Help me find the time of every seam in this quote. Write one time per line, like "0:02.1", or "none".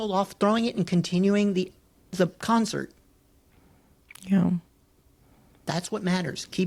none